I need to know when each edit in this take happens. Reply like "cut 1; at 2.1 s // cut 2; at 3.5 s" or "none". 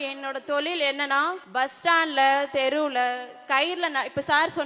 cut 1; at 1.4 s